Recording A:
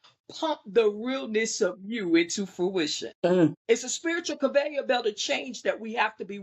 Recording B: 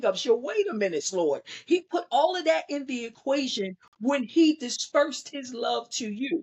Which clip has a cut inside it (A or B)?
A